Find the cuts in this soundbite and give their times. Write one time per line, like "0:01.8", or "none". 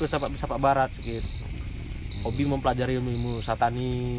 none